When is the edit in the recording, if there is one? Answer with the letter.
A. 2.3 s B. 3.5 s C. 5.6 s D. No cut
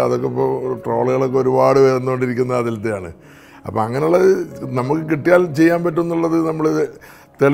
D